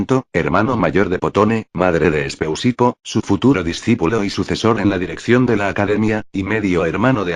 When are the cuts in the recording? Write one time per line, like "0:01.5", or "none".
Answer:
0:02.8